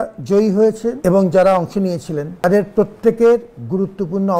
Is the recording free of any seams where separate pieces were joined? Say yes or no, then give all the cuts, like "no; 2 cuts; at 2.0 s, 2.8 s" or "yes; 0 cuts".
no; 2 cuts; at 1.0 s, 2.4 s